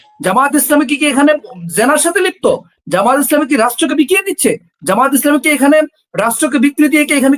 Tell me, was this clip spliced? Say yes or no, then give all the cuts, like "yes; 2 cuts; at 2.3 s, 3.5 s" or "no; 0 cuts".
no; 0 cuts